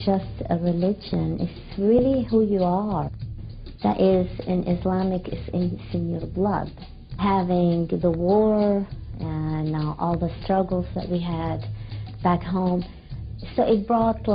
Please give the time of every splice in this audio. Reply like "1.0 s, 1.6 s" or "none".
7.2 s

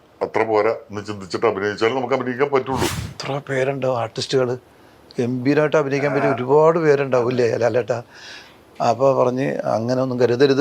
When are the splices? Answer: 3.1 s

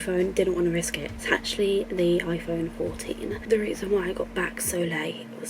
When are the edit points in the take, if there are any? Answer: none

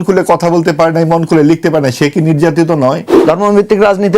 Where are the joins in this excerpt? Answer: 3.1 s

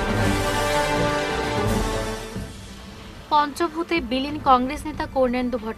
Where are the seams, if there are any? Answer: none

